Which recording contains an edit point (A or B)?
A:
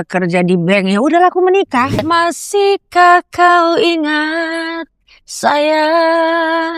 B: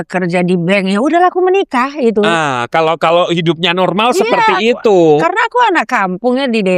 A